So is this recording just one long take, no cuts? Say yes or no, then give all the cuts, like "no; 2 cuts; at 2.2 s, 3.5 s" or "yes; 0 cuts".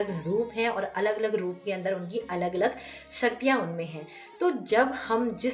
yes; 0 cuts